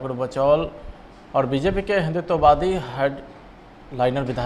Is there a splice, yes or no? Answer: no